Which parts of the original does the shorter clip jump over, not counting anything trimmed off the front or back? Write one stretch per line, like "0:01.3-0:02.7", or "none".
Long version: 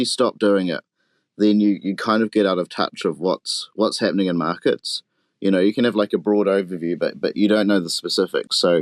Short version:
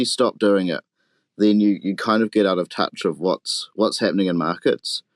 none